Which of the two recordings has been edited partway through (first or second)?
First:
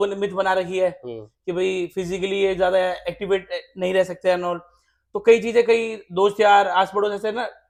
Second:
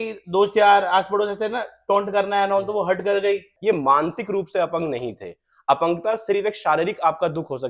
second